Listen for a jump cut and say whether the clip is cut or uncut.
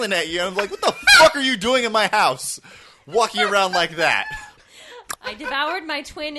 cut